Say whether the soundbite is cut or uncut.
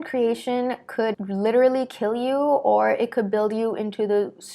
cut